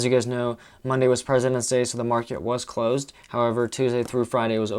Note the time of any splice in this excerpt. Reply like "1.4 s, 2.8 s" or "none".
none